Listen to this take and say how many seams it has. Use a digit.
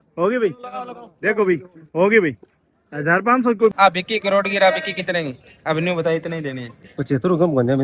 1